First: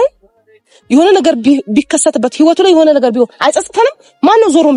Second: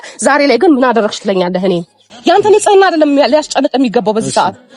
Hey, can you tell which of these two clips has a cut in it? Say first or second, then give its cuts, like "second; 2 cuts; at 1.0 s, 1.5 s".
second; 1 cut; at 2.1 s